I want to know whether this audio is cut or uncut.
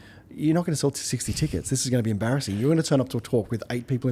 uncut